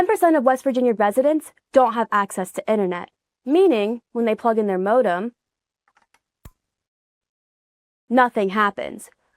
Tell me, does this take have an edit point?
no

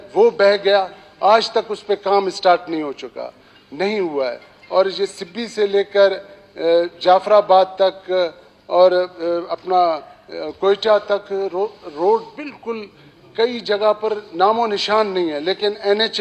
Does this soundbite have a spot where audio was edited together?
no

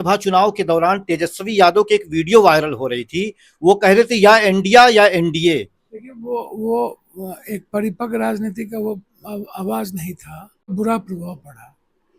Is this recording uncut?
no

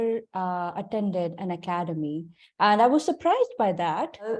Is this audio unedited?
yes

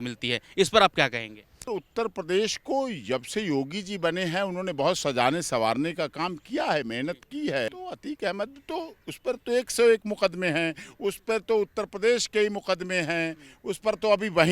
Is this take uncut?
no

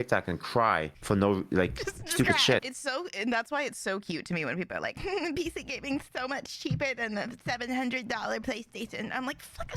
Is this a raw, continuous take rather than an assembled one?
no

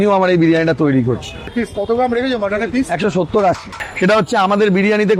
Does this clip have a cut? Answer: yes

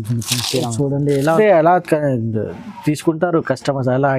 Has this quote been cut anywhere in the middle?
yes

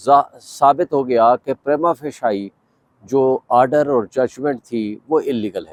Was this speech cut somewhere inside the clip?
no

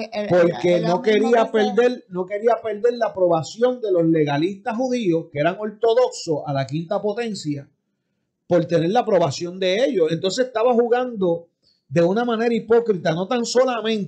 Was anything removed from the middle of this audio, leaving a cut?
no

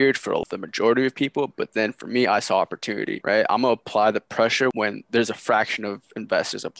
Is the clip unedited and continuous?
no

